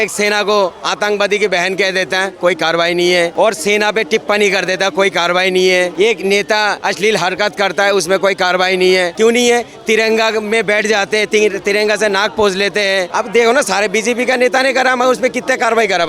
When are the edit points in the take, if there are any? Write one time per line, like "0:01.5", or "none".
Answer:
none